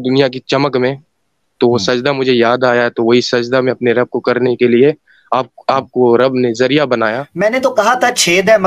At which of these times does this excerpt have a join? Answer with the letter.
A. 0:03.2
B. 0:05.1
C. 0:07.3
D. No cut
C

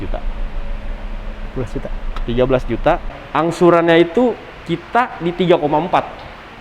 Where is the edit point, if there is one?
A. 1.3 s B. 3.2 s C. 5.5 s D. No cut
B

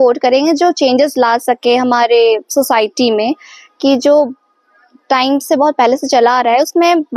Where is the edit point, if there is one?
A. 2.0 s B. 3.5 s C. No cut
C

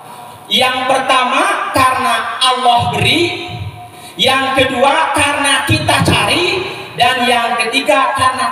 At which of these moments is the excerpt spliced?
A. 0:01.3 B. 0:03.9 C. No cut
C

